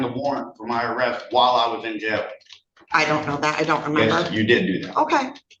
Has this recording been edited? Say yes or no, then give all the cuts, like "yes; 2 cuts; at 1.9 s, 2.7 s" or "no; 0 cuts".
no; 0 cuts